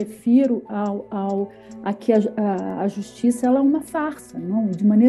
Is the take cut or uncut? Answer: uncut